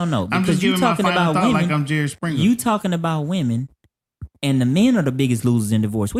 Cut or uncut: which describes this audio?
uncut